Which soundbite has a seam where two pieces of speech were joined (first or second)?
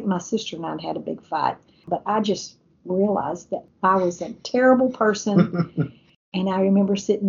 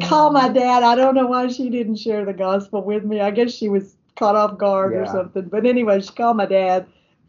first